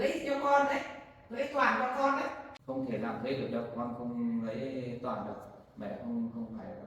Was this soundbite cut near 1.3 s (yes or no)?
no